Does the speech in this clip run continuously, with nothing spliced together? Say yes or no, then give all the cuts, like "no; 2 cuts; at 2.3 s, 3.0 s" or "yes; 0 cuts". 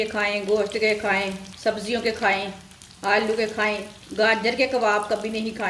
no; 2 cuts; at 1.4 s, 4.0 s